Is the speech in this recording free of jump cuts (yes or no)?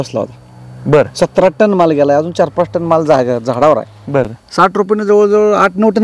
no